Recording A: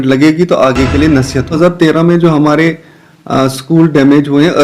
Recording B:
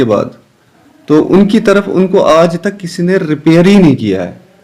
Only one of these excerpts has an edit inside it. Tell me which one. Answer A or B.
A